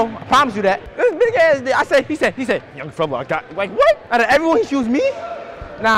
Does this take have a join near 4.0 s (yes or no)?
yes